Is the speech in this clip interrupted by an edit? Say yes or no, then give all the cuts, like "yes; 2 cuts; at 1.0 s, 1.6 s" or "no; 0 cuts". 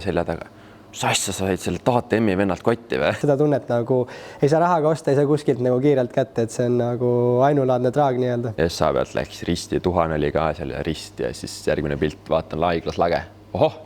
yes; 2 cuts; at 3.2 s, 8.5 s